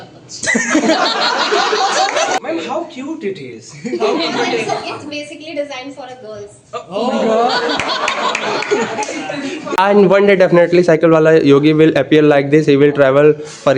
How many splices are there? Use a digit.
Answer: 2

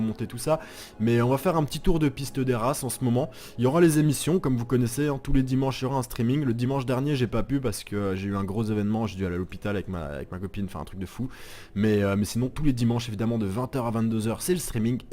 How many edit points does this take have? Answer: 1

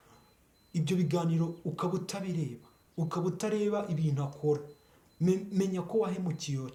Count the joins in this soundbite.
0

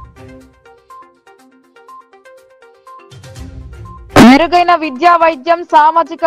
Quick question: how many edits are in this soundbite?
2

